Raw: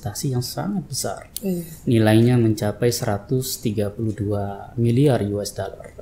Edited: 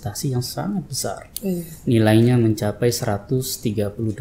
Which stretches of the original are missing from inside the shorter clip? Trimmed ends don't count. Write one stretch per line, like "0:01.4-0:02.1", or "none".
none